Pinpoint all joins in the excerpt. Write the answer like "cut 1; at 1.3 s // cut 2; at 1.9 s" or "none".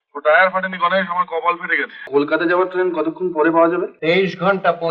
cut 1; at 2.1 s // cut 2; at 3.9 s